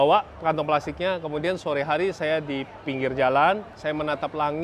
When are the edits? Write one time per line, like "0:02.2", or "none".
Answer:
0:03.7